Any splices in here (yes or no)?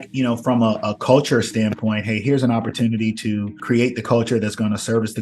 yes